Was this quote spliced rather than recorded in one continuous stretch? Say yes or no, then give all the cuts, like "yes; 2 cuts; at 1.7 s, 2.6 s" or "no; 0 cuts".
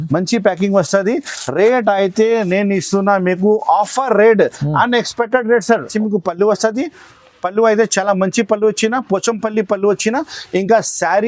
yes; 1 cut; at 5.9 s